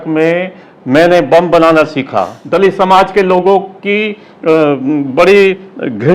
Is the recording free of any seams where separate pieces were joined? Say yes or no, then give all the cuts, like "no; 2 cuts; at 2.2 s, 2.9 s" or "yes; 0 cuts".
no; 1 cut; at 2.4 s